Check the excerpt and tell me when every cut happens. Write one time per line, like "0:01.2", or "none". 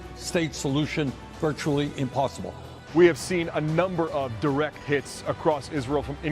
0:02.7